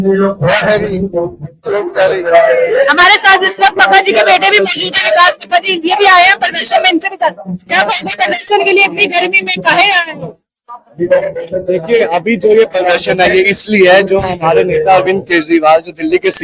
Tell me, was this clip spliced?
no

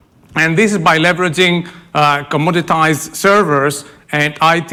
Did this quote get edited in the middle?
no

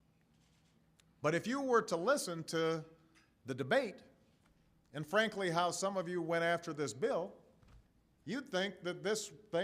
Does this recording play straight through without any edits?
yes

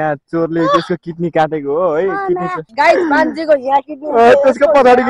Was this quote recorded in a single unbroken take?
no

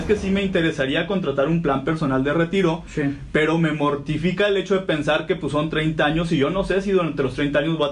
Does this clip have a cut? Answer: no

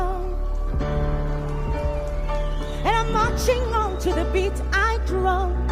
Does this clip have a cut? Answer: no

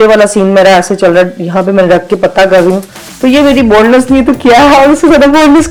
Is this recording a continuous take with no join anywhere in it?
yes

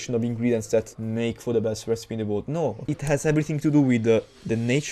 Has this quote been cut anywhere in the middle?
yes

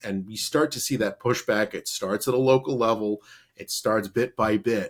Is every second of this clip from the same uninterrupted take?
yes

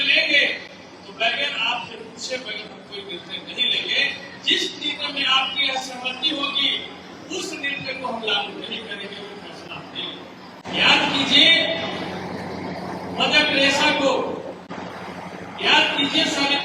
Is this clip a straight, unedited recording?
no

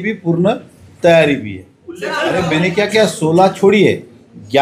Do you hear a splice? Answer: yes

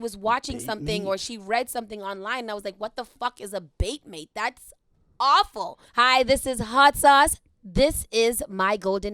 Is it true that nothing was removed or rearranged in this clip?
no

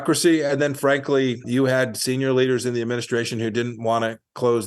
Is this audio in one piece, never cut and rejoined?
no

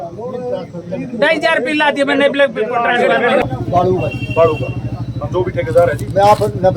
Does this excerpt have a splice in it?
yes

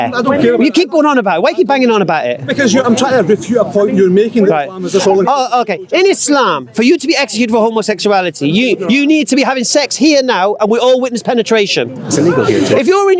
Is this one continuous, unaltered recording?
yes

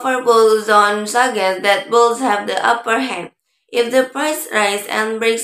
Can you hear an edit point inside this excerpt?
no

